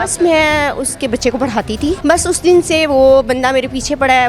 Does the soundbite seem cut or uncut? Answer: cut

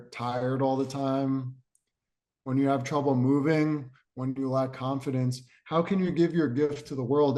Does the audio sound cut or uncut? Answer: uncut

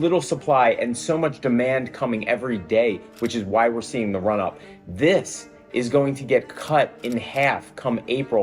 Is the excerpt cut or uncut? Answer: uncut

